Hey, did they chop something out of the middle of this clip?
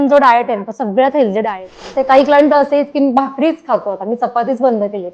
yes; 1 cut; at 1.9 s

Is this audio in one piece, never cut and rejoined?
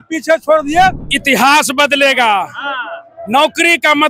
no; 1 cut; at 1.1 s

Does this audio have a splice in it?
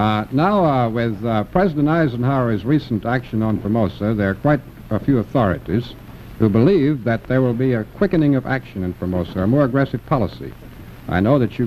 no; 0 cuts

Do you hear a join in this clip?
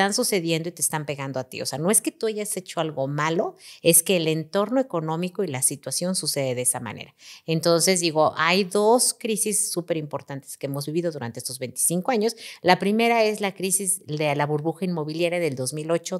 no; 0 cuts

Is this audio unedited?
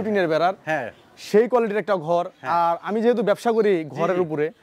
yes; 0 cuts

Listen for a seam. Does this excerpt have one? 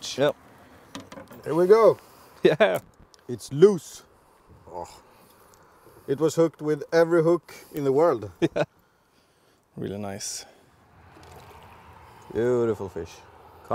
yes; 1 cut; at 8.7 s

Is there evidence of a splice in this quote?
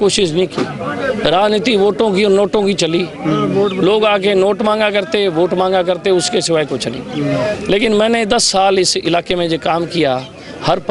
no; 0 cuts

